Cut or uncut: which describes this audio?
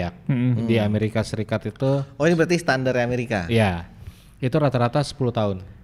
uncut